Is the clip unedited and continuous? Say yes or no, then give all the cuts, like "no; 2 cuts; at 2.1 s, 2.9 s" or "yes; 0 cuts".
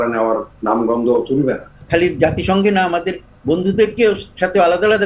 no; 1 cut; at 1.8 s